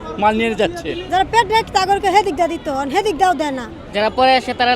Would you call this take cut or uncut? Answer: cut